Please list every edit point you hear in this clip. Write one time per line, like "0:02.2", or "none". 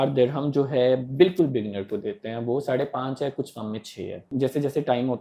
0:04.3